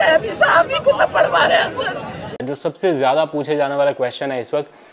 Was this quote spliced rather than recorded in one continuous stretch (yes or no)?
yes